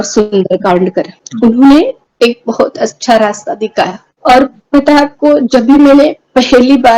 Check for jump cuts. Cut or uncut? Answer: cut